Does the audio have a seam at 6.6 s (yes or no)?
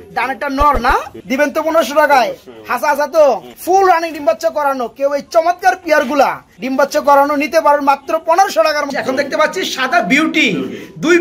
yes